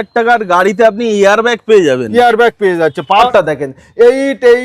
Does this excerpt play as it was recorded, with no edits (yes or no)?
no